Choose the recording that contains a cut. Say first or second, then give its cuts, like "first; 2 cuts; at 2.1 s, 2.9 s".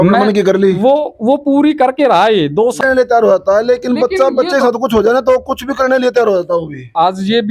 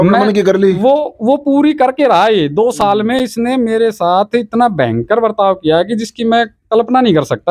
first; 1 cut; at 2.8 s